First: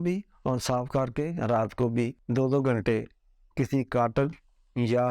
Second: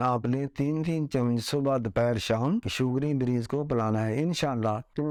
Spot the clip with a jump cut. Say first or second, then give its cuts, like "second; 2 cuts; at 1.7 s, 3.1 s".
first; 1 cut; at 2.2 s